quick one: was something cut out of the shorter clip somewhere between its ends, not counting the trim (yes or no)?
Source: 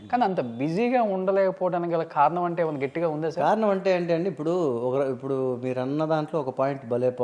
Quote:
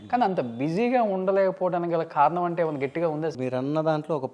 yes